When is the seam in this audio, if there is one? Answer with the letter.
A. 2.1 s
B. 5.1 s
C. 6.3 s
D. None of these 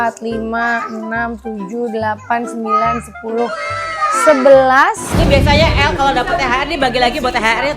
B